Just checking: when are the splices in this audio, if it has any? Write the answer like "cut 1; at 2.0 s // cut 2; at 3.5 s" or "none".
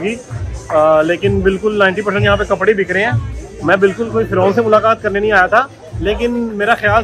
none